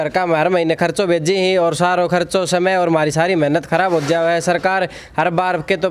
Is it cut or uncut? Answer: uncut